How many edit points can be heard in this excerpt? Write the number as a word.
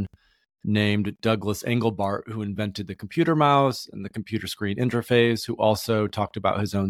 zero